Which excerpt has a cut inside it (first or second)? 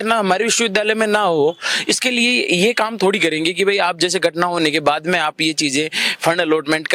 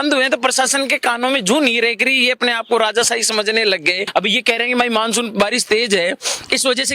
second